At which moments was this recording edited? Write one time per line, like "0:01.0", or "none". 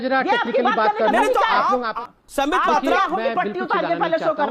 0:01.9

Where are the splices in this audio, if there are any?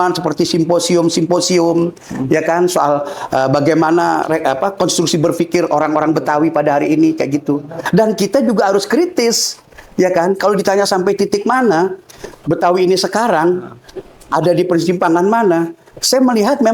0:07.8

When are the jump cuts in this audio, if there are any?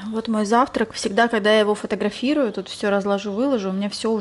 none

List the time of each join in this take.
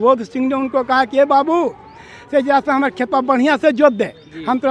none

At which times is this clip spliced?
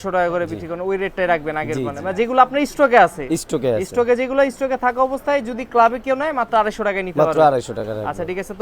none

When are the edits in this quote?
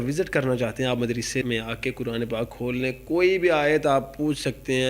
0:01.4

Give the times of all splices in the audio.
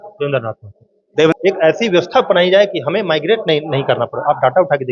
0:01.3

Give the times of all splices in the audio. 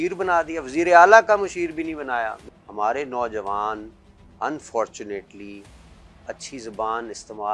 0:02.4

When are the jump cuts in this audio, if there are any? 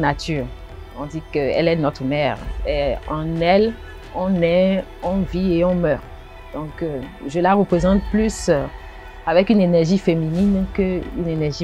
none

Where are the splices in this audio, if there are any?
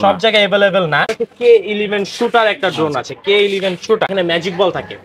0:01.1
0:04.1

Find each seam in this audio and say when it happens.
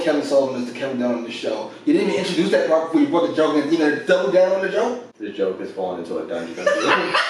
0:05.1

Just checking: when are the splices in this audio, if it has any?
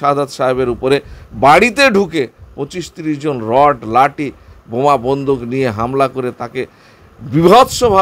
none

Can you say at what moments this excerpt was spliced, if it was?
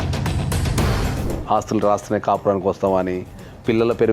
0:01.2

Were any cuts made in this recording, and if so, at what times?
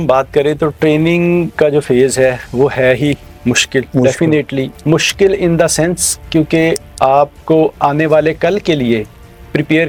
none

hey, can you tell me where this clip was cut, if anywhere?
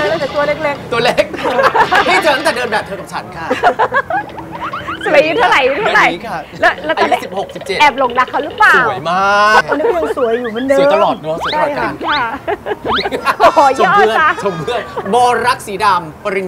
none

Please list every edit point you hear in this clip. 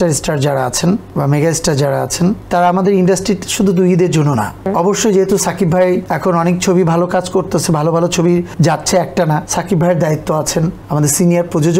0:01.1
0:02.4
0:04.6
0:06.1
0:08.5
0:09.5
0:10.8

